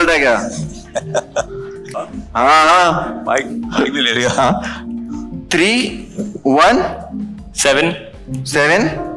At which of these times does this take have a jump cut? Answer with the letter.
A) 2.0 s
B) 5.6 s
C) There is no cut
A